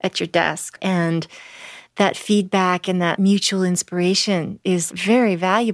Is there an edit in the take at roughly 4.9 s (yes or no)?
yes